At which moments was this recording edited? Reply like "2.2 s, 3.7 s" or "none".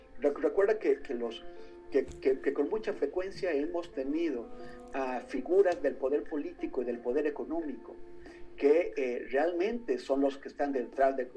none